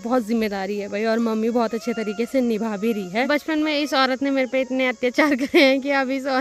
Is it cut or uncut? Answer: cut